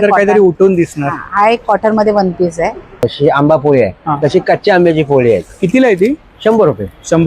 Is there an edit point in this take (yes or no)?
yes